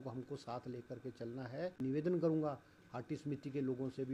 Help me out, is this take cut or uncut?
cut